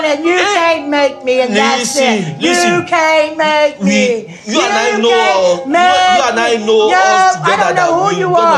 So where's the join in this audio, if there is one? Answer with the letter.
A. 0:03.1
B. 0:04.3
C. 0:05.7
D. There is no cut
D